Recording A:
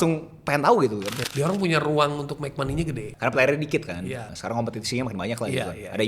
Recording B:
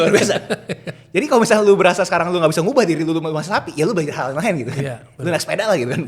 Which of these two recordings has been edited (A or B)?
A